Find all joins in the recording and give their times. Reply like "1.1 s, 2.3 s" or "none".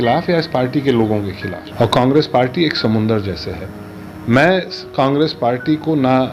1.5 s

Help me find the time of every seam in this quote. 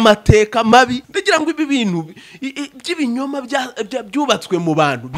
1.0 s

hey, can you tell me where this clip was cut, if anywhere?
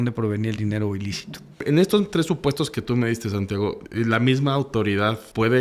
1.6 s, 3.8 s

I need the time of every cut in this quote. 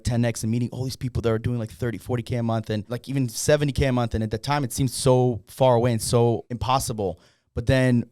2.9 s, 6.5 s

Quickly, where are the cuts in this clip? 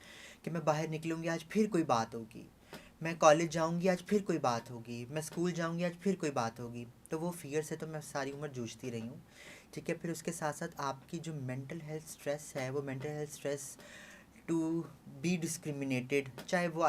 none

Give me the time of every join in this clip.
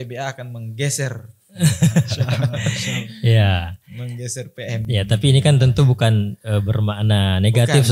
none

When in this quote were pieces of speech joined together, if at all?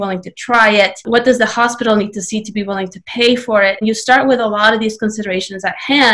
1.0 s, 3.8 s

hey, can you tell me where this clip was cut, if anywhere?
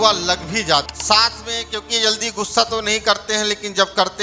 0.9 s

